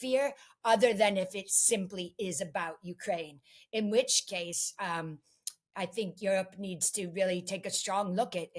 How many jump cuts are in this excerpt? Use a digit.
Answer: 0